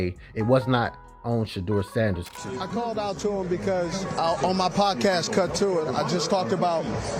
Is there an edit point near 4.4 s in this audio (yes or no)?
no